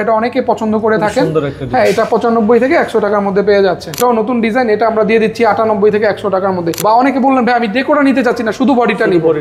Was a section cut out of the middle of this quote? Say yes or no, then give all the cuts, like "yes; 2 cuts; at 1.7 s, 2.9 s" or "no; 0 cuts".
yes; 2 cuts; at 4.0 s, 6.8 s